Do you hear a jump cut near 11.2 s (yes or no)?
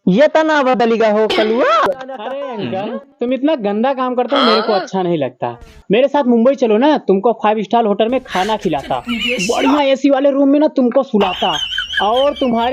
no